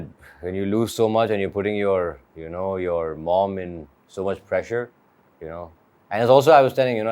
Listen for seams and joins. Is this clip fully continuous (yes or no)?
yes